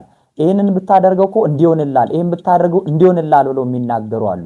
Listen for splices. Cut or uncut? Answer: uncut